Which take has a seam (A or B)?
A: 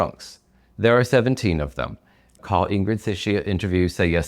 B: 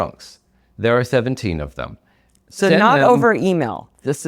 A